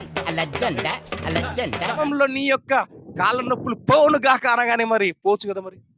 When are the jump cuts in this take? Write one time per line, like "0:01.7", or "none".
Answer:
0:02.0